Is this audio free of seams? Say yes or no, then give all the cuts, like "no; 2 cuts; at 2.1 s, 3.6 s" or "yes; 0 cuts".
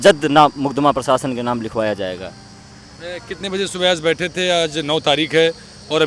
yes; 0 cuts